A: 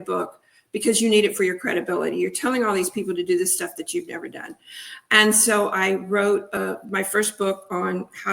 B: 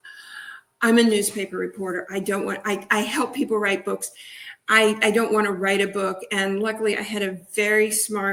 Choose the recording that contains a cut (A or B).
A